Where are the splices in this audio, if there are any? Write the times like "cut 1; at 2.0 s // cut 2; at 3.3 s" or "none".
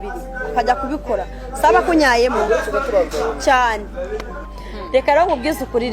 cut 1; at 4.3 s